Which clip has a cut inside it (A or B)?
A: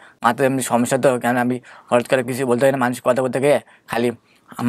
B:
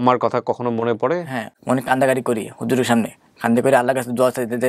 B